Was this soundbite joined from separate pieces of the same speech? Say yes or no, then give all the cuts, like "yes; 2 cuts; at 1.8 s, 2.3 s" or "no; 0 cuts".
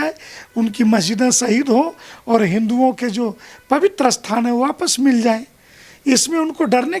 no; 0 cuts